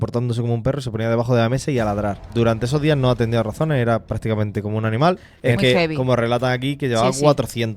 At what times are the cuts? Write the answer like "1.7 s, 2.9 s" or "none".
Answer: 2.2 s, 5.3 s